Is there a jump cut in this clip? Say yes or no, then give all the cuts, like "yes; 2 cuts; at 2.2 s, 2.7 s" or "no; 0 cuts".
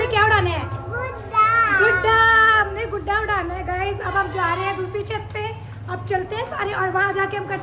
no; 0 cuts